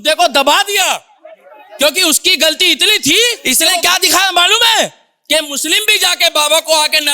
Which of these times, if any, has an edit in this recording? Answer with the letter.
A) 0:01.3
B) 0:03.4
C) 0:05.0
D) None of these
B